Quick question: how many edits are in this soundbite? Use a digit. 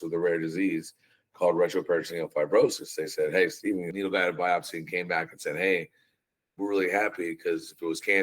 1